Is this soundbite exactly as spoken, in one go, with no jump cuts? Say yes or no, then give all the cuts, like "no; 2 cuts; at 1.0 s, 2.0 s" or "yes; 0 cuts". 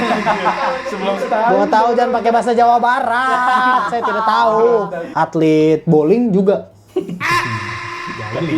no; 1 cut; at 5.0 s